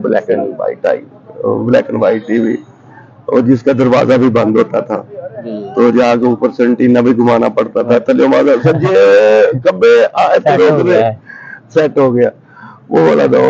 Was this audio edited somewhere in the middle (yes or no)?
no